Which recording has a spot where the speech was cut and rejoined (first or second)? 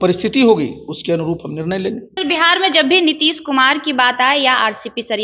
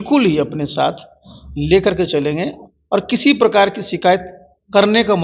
first